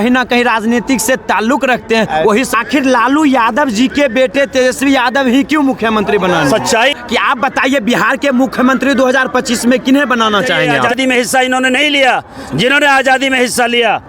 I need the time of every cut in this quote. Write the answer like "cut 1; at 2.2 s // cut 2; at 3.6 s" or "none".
cut 1; at 2.5 s // cut 2; at 7.0 s // cut 3; at 10.7 s